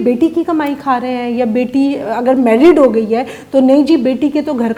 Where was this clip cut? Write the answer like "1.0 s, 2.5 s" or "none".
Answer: none